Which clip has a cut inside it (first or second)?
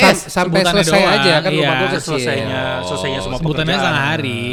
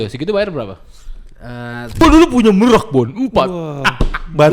second